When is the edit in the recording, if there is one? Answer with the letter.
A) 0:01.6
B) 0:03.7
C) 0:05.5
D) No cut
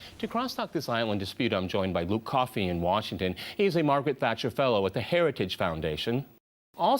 C